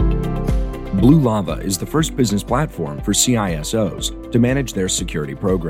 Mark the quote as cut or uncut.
cut